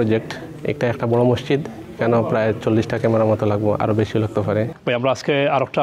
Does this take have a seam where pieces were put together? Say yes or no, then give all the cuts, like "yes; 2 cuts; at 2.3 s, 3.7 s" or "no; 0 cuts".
yes; 1 cut; at 4.8 s